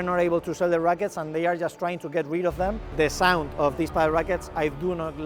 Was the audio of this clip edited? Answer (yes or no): yes